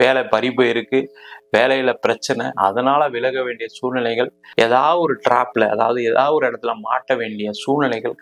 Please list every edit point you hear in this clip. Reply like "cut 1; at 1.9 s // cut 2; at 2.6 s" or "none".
cut 1; at 4.4 s